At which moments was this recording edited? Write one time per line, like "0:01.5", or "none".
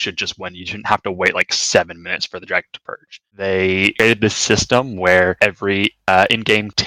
0:03.3